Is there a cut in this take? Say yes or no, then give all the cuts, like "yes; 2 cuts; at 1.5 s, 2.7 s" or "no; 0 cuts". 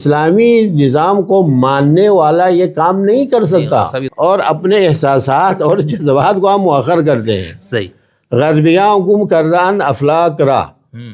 yes; 1 cut; at 4.0 s